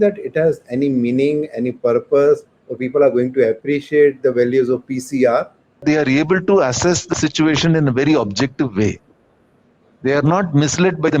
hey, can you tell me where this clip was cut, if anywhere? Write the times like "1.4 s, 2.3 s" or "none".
5.8 s